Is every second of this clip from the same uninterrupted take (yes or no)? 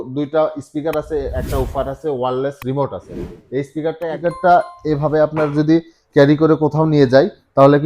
no